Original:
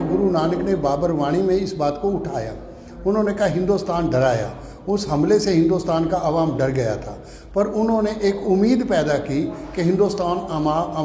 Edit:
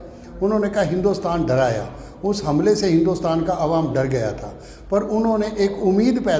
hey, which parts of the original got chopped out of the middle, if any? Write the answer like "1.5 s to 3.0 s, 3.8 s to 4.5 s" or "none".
none